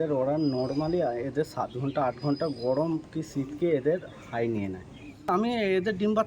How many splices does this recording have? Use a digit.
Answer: 1